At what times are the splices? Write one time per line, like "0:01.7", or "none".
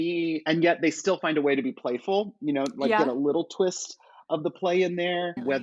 none